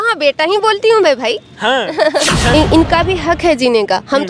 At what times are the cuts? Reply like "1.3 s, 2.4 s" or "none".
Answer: 2.5 s

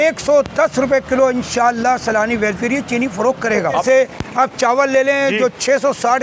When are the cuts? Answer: 3.8 s

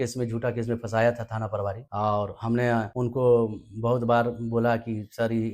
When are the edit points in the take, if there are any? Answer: 1.8 s, 2.9 s

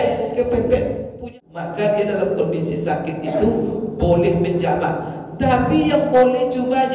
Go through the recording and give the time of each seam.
1.2 s

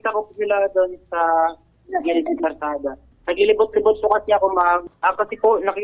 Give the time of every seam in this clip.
3.1 s, 4.9 s

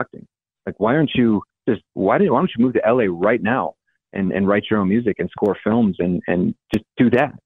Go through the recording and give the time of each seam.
1.5 s

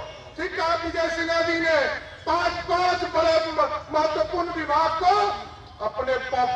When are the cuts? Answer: none

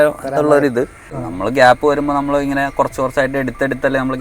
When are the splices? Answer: 1.2 s

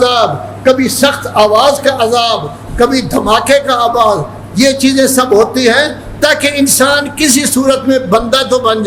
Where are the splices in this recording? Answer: none

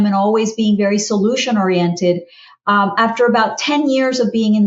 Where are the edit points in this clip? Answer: none

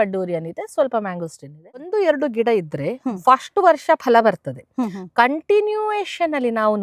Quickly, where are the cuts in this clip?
1.8 s

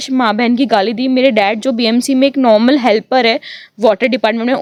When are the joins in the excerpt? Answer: none

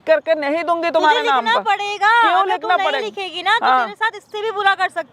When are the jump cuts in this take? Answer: none

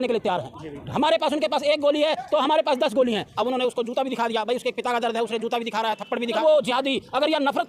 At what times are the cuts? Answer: 3.3 s, 6.4 s

